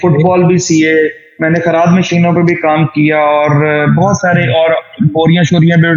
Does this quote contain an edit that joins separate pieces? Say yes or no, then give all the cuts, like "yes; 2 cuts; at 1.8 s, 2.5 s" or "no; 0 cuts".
no; 0 cuts